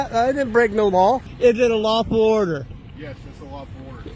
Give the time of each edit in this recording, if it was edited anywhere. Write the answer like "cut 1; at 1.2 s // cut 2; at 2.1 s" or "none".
cut 1; at 1.3 s